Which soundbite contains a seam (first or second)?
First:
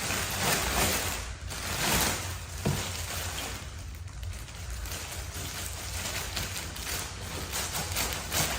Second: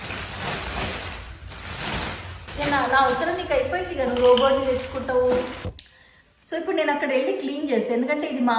second